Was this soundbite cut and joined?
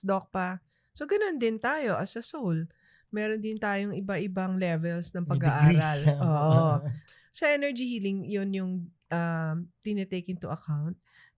yes; 1 cut; at 7.1 s

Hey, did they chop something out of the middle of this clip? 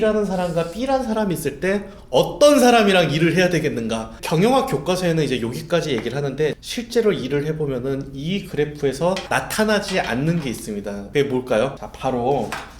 yes; 5 cuts; at 4.2 s, 6.6 s, 9.2 s, 11.0 s, 11.9 s

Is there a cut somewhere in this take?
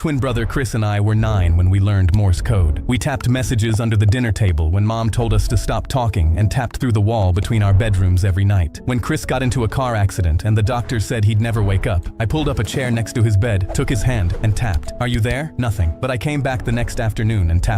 yes; 1 cut; at 1.1 s

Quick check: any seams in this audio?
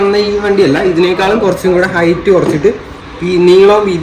no; 0 cuts

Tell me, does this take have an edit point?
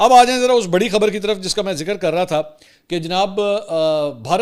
no; 0 cuts

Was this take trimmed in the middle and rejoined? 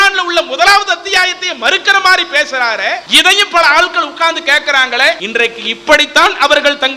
yes; 2 cuts; at 3.1 s, 5.2 s

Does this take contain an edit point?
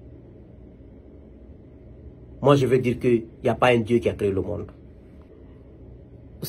yes; 1 cut; at 5.3 s

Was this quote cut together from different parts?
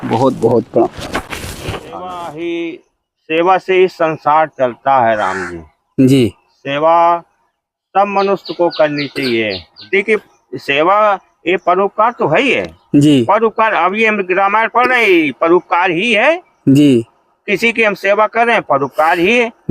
yes; 2 cuts; at 2.0 s, 9.8 s

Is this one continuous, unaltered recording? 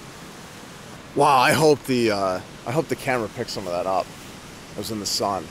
no; 1 cut; at 1.2 s

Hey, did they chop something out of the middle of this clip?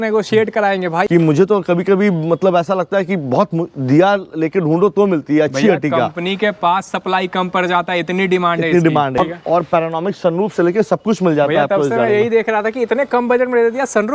yes; 2 cuts; at 1.1 s, 9.2 s

